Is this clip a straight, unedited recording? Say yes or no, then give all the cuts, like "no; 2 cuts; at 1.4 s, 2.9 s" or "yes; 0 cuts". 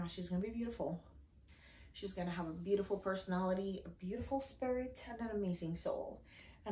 yes; 0 cuts